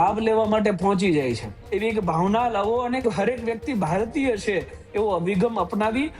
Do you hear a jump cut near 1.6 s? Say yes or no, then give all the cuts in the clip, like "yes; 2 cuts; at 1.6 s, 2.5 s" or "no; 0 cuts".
yes; 1 cut; at 1.6 s